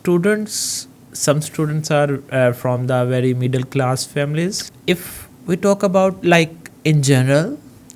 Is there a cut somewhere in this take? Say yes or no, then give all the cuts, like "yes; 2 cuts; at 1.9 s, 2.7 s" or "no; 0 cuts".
yes; 1 cut; at 4.6 s